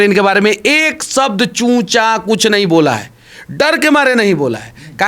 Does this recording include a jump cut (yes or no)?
no